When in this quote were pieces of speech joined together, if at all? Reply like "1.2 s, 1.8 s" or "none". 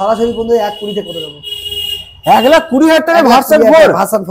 none